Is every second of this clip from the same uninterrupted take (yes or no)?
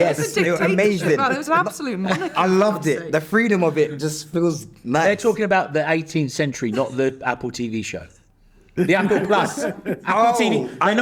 yes